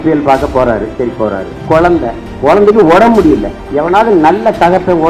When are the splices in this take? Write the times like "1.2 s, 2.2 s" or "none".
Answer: 1.5 s, 2.3 s, 3.6 s